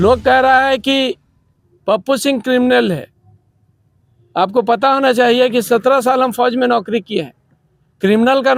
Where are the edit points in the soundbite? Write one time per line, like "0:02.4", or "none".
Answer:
none